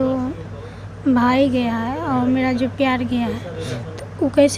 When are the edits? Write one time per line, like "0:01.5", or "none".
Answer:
none